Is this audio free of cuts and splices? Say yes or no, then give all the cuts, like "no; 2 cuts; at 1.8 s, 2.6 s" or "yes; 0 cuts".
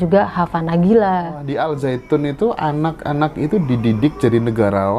no; 1 cut; at 1.5 s